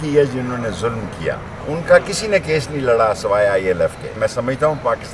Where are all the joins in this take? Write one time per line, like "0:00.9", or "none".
0:01.5
0:04.2